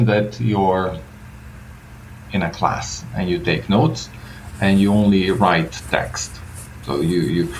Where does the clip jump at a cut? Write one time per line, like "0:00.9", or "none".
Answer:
none